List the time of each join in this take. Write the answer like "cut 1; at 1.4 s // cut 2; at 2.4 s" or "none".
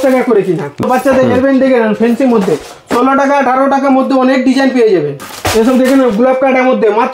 cut 1; at 0.8 s // cut 2; at 5.1 s